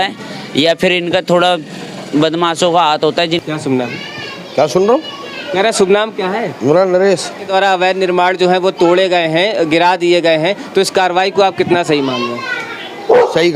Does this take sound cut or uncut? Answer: cut